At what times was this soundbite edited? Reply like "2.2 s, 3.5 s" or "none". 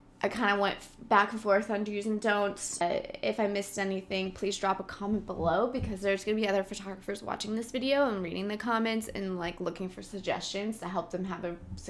2.8 s